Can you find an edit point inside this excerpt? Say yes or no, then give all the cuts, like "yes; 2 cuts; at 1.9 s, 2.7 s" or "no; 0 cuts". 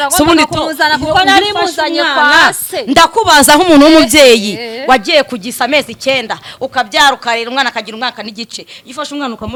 no; 0 cuts